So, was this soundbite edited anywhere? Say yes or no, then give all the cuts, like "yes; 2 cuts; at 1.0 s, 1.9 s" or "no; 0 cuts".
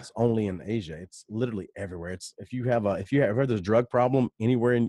no; 0 cuts